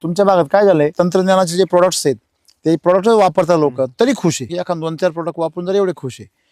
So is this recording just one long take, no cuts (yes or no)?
no